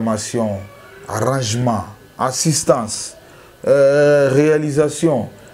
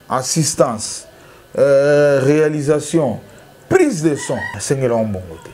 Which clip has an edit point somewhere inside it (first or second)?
second